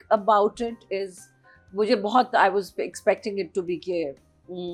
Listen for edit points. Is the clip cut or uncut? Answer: uncut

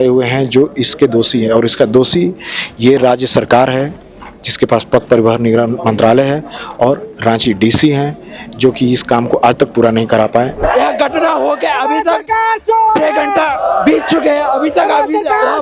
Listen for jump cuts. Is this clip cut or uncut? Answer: cut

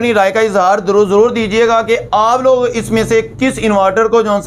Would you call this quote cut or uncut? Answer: uncut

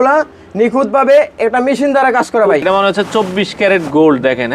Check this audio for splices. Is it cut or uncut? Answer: cut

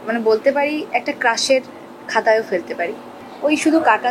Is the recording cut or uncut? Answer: cut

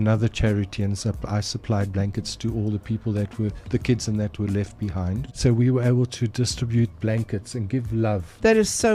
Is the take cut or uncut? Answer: cut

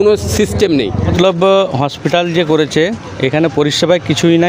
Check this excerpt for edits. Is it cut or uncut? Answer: cut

